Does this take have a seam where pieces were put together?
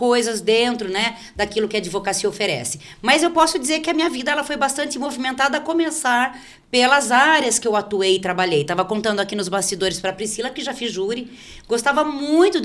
no; 0 cuts

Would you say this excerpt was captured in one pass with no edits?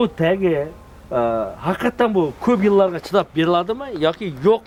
yes; 0 cuts

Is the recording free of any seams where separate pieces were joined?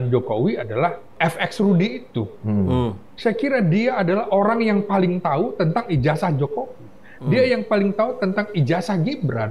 no; 1 cut; at 1.1 s

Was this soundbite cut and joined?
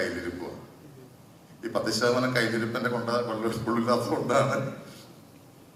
no; 0 cuts

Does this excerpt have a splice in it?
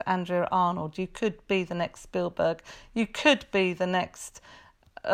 no; 0 cuts

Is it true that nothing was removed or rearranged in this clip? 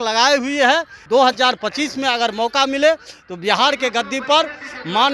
no; 1 cut; at 1.0 s

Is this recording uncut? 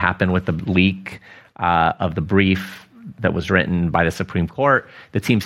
yes; 0 cuts

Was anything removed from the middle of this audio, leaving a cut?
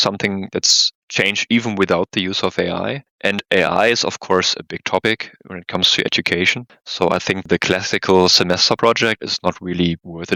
no; 0 cuts

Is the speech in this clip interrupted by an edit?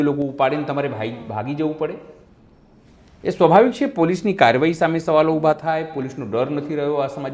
no; 0 cuts

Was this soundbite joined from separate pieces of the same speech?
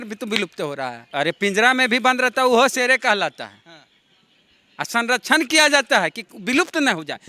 yes; 1 cut; at 1.0 s

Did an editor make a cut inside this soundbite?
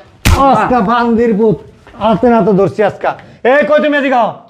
no; 0 cuts

